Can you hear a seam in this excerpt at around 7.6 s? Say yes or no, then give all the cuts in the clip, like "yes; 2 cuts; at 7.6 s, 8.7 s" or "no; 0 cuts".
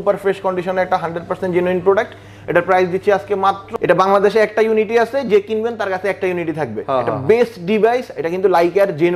no; 1 cut; at 3.6 s